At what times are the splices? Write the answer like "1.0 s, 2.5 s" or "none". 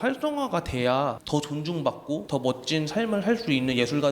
1.2 s, 2.2 s